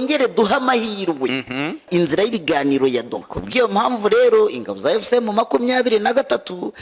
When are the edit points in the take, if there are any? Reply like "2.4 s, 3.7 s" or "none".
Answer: 1.9 s, 3.3 s